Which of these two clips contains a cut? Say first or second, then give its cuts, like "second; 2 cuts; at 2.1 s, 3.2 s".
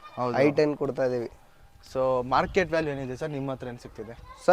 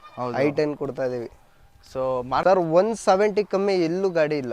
second; 1 cut; at 2.4 s